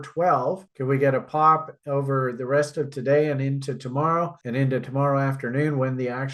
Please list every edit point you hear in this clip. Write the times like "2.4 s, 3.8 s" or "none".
none